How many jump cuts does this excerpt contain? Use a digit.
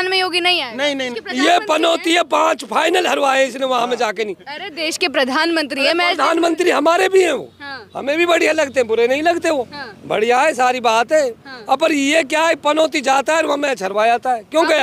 1